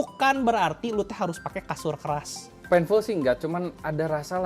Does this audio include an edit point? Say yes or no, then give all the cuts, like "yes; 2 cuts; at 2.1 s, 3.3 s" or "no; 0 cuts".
yes; 1 cut; at 2.5 s